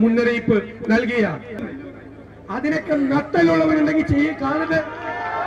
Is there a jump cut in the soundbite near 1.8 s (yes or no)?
yes